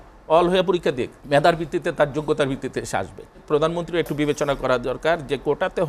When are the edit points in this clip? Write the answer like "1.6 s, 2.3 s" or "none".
1.1 s, 3.4 s

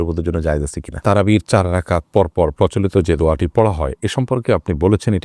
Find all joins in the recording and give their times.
0.9 s

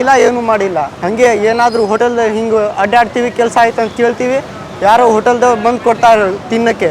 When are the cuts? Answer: 1.0 s

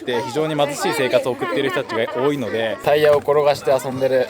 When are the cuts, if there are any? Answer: 2.8 s

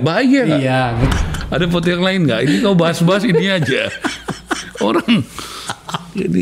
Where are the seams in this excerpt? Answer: 1.1 s

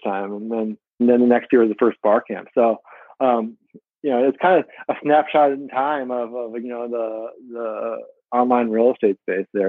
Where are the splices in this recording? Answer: 1.0 s

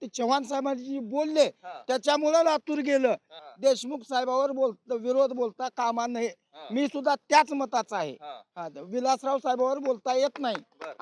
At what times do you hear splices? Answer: 3.4 s

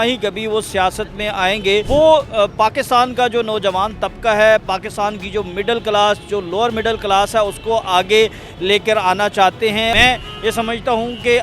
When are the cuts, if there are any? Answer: 1.9 s, 9.9 s

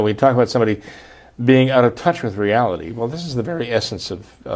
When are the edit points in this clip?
none

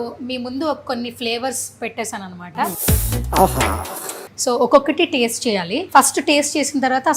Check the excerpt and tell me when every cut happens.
2.8 s, 4.3 s, 5.8 s

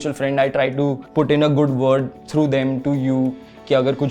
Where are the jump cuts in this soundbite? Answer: 1.0 s, 2.2 s

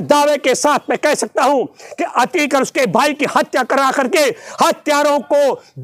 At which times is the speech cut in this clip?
none

